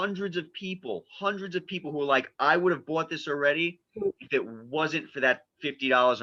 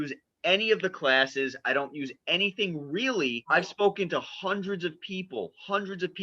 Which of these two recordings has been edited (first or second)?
second